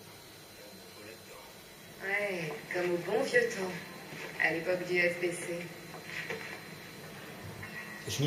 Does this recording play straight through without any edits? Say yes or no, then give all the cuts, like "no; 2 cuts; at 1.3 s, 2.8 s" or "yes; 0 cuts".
no; 1 cut; at 1.2 s